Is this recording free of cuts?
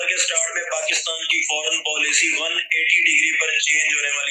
yes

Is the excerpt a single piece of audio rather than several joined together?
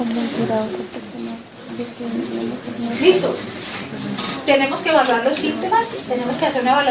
no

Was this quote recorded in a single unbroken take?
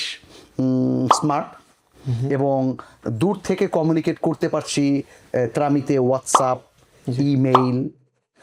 yes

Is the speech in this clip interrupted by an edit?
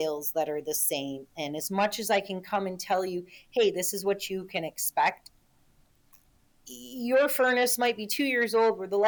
no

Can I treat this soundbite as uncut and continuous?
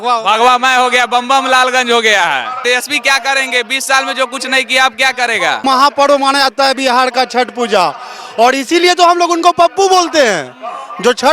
no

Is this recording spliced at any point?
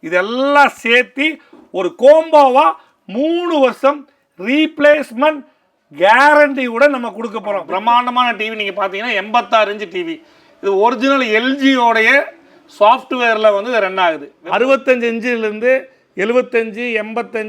yes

